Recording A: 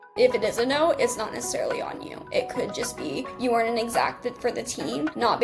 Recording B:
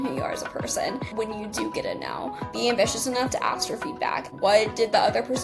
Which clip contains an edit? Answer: B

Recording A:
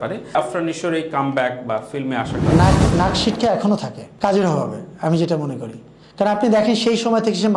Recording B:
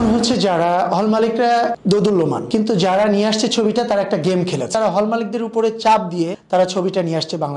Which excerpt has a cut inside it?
B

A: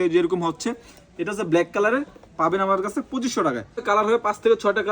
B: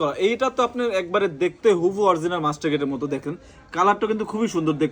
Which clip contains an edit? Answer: A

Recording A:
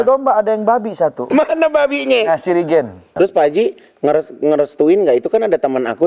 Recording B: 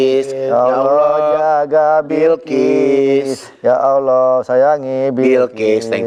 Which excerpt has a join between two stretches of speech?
A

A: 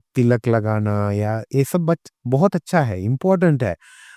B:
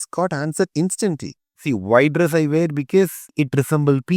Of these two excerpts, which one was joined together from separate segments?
B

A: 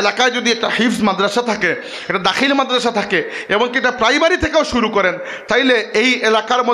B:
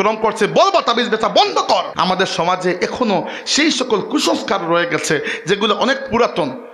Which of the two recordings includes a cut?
B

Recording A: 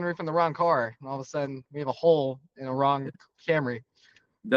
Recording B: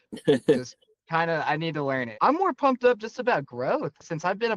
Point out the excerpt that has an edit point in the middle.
B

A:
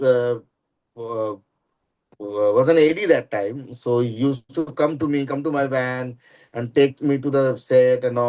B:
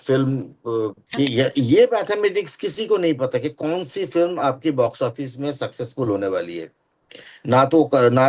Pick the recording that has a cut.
B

